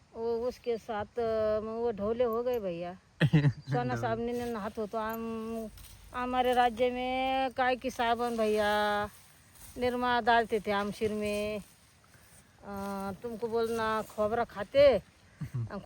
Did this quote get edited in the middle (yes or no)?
no